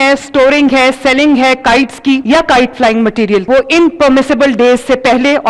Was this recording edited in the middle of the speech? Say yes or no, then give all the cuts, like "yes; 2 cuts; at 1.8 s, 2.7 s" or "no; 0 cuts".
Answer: yes; 2 cuts; at 2.2 s, 3.4 s